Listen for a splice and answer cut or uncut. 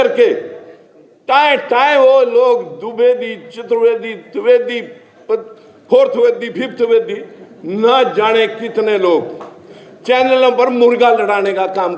uncut